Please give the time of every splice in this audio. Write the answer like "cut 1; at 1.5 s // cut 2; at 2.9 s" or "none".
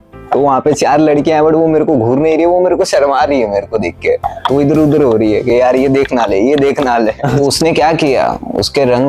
cut 1; at 7.4 s